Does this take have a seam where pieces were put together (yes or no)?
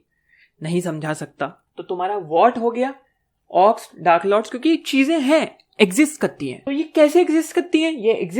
yes